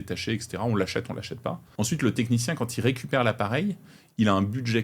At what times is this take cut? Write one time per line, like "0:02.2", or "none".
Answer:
0:01.6